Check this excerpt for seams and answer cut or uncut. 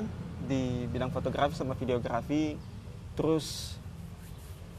uncut